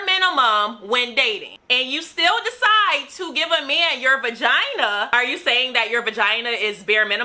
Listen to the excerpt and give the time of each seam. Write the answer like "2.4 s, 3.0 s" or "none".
5.1 s